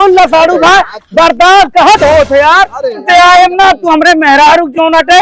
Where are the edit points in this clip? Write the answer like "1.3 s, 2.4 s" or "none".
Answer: 3.0 s